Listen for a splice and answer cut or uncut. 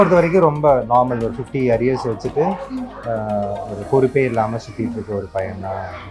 uncut